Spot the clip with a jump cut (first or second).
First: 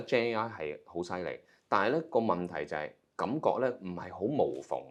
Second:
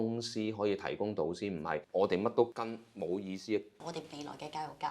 second